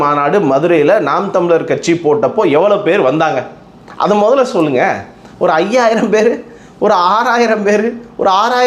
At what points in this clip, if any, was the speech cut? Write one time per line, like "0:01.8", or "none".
none